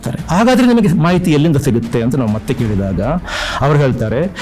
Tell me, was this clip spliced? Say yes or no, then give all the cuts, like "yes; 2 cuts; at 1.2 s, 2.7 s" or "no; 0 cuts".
no; 0 cuts